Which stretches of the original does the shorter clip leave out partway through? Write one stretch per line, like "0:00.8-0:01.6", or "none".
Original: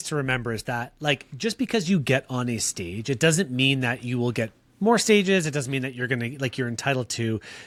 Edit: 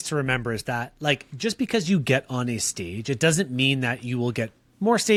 none